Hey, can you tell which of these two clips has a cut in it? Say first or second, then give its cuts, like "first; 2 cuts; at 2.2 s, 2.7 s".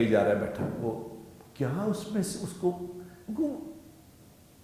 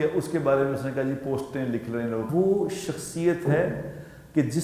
second; 1 cut; at 2.3 s